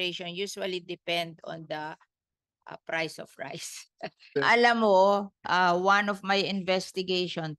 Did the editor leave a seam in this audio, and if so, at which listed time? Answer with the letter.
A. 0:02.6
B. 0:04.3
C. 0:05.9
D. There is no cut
B